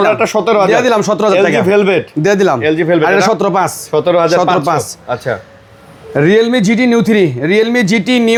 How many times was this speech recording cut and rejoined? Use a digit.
0